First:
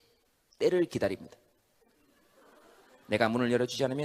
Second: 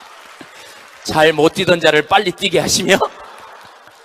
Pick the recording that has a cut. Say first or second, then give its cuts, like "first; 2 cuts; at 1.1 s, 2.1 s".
first; 1 cut; at 1.2 s